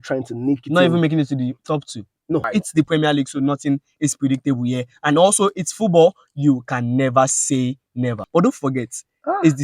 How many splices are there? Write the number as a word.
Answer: two